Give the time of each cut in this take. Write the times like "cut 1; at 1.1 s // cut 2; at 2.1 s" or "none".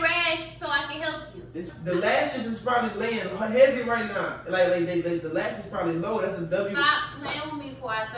cut 1; at 1.7 s